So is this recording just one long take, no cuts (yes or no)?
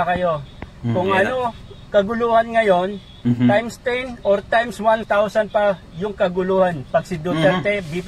yes